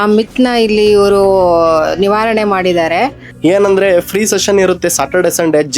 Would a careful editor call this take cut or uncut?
cut